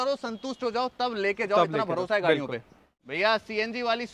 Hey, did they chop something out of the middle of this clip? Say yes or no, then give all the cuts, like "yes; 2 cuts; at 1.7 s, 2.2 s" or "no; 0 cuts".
yes; 1 cut; at 3.1 s